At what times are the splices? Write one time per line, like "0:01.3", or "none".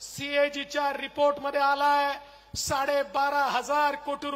none